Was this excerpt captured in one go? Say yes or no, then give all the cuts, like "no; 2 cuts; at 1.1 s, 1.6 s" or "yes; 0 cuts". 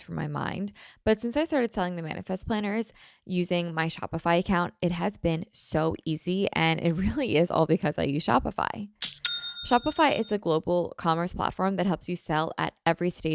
yes; 0 cuts